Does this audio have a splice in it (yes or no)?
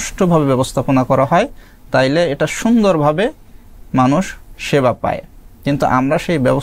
no